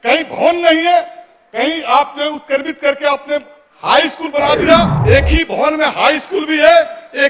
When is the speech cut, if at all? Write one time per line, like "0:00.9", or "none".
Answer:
0:04.9